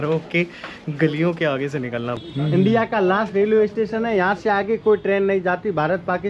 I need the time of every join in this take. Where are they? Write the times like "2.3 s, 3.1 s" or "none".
2.2 s